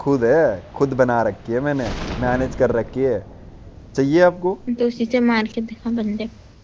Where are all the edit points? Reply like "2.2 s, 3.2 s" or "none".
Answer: 4.3 s